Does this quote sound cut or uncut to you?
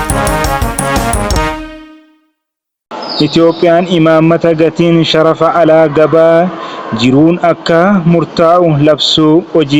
uncut